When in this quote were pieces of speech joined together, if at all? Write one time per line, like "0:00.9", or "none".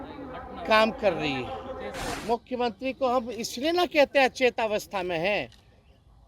0:02.1